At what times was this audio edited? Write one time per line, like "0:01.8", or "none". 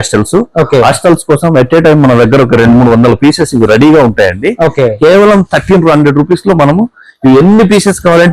none